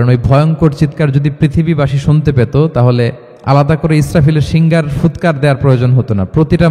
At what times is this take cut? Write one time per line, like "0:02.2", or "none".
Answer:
0:03.3